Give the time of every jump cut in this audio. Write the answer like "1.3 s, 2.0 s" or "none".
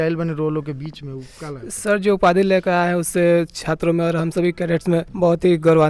none

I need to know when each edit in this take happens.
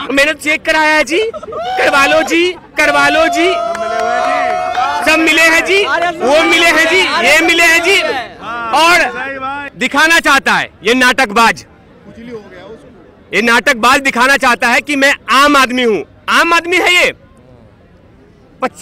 9.6 s

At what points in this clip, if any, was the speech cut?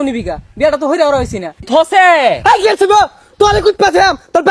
1.7 s

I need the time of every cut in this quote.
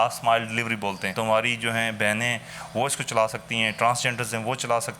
1.1 s

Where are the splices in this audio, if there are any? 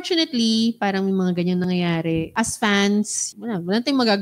2.3 s, 3.2 s

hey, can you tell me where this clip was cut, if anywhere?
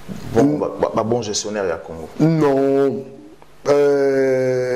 none

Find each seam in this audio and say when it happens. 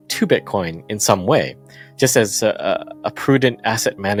none

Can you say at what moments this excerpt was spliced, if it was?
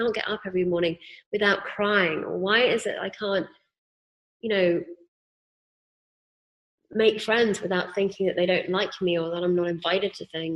none

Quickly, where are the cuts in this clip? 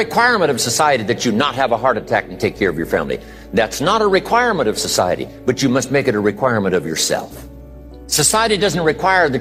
none

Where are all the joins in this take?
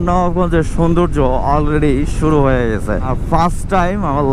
3.2 s

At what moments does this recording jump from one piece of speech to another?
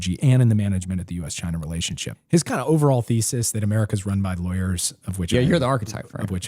2.1 s

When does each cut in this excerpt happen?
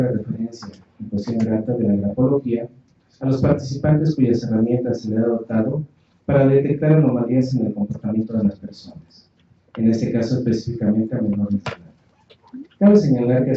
none

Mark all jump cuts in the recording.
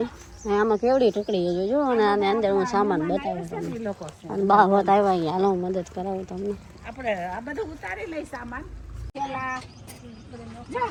none

